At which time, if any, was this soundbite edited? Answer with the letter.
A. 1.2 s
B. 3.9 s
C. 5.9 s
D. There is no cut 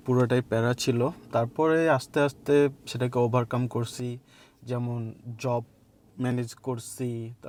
D